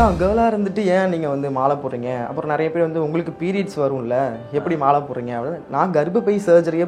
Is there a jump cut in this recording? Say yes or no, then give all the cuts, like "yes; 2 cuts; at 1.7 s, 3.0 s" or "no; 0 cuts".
no; 0 cuts